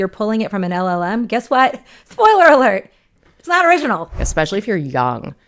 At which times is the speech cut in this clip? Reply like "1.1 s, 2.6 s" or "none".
4.2 s